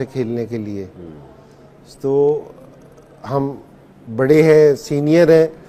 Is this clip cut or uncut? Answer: uncut